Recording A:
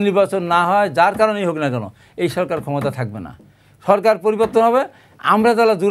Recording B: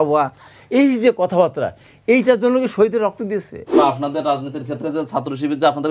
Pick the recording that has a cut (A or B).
B